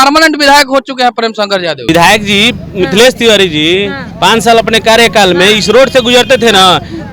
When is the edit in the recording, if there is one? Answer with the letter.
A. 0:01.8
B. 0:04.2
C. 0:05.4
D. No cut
A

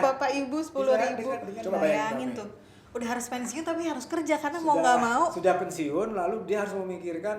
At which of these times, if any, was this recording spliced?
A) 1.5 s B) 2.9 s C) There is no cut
A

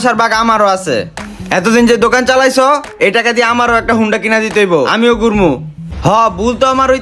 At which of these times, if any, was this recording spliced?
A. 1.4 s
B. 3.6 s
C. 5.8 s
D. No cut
C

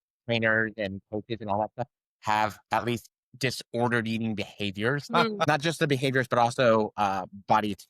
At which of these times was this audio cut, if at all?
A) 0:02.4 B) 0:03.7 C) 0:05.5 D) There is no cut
C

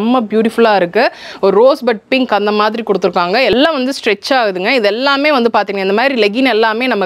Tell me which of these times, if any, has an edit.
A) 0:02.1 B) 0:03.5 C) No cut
B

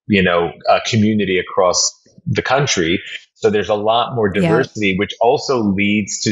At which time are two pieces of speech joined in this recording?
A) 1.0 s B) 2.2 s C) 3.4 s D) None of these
D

